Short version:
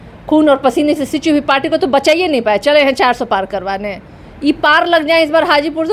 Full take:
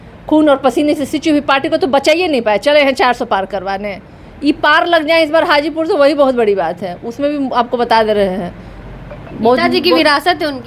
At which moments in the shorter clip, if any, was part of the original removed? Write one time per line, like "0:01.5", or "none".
none